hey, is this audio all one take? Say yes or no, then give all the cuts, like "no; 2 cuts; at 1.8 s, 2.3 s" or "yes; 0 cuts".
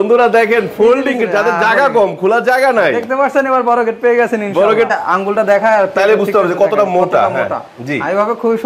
no; 1 cut; at 4.9 s